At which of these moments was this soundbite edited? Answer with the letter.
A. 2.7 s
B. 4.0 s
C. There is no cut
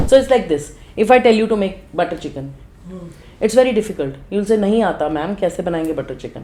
C